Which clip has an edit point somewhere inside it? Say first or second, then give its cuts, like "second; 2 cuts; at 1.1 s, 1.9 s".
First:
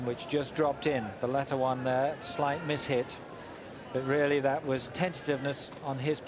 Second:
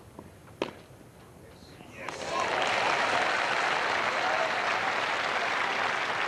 second; 1 cut; at 3.7 s